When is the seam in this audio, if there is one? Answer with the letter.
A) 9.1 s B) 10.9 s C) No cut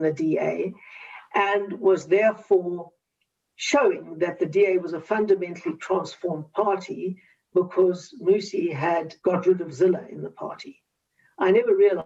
A